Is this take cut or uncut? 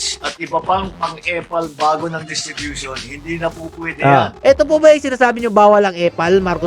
cut